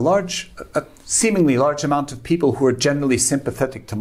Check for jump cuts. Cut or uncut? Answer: uncut